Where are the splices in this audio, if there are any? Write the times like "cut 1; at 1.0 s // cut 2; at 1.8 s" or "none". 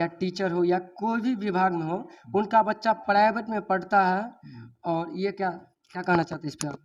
none